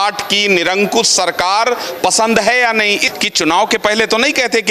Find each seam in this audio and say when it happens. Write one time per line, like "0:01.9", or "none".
0:03.1